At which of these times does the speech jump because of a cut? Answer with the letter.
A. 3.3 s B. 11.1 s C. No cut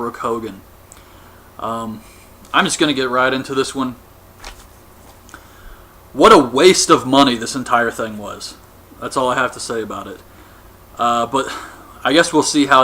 B